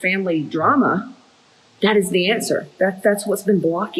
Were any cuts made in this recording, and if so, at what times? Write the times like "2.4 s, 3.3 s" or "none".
none